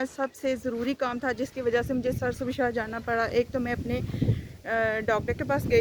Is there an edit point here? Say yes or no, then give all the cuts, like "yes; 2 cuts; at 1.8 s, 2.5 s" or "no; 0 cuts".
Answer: no; 0 cuts